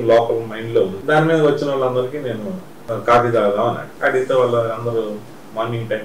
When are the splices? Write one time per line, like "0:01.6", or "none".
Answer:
0:01.0
0:02.7
0:03.9